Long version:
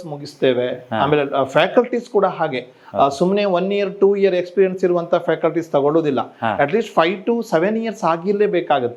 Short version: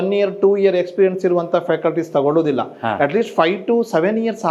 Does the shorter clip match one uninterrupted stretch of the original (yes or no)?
yes